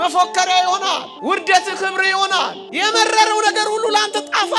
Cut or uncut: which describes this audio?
cut